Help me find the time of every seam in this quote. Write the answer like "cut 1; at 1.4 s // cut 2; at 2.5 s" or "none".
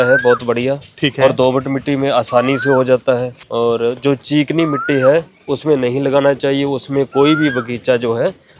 none